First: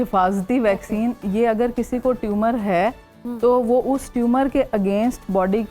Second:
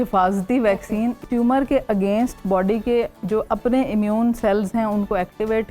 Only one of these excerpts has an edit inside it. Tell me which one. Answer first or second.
second